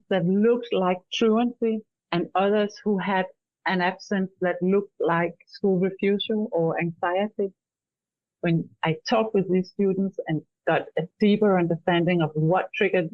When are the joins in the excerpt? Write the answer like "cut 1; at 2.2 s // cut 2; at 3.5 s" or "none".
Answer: none